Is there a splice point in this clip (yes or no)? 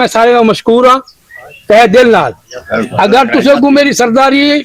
no